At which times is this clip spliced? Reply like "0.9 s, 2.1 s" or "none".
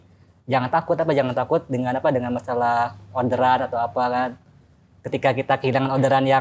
none